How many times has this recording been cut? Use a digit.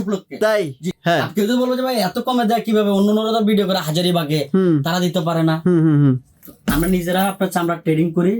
1